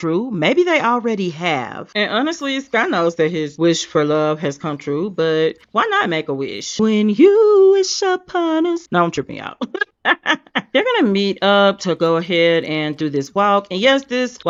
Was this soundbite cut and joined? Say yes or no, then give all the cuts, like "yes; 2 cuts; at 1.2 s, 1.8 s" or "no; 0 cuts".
no; 0 cuts